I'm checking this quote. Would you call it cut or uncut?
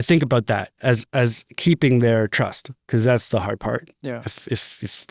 uncut